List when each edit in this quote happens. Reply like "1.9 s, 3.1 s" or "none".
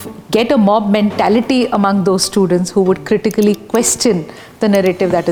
none